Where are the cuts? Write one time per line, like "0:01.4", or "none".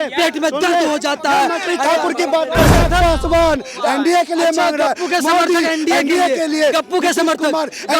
0:02.8